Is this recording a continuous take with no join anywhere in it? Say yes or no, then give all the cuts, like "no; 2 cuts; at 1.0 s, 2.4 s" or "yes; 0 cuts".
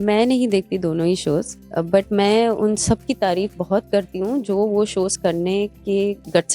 no; 1 cut; at 1.6 s